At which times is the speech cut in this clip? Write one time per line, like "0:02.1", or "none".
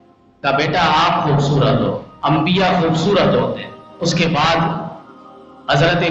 0:03.8